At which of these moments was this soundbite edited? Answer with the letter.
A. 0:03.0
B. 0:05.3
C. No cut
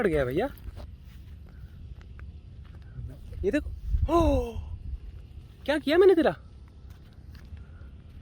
C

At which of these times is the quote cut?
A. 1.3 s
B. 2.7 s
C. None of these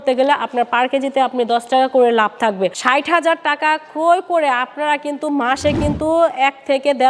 B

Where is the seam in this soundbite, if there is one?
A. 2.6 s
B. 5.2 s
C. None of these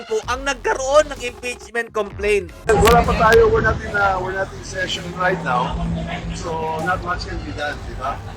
A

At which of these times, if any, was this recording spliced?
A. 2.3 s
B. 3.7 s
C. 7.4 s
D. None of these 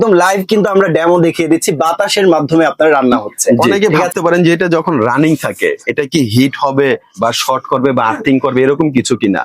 B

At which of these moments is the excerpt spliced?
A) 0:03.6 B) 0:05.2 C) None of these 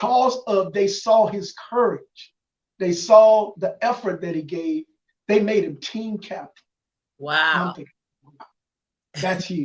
C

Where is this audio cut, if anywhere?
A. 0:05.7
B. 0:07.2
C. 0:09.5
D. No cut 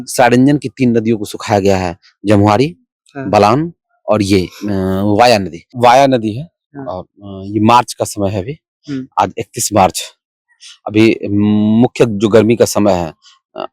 A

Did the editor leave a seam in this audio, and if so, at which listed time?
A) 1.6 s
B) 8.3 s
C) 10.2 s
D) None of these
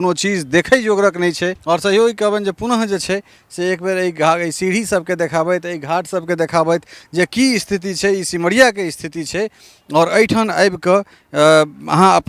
A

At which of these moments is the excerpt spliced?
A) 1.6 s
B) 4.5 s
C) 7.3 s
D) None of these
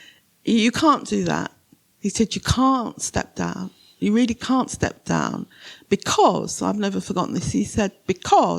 D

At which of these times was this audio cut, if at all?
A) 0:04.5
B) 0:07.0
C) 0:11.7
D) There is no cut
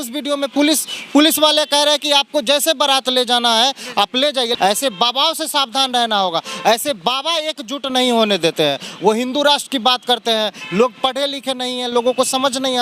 A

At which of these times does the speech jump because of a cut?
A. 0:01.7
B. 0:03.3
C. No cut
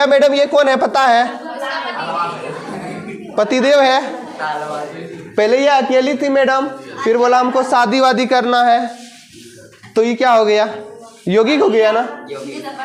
C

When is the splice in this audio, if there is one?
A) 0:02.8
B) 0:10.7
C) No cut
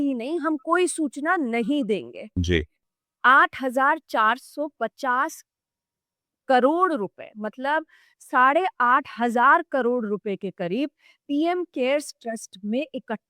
A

